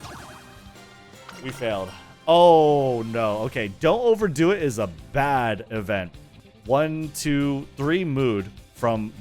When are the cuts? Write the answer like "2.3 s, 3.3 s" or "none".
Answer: 6.2 s

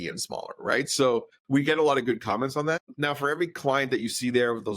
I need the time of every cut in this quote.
1.4 s, 2.9 s

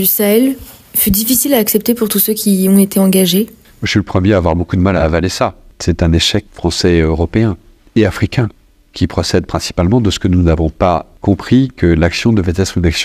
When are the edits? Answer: none

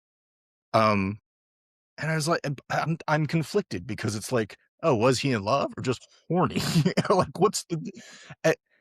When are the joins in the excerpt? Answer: none

